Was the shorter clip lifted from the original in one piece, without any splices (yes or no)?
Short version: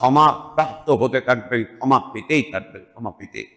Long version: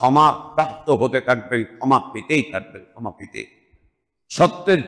yes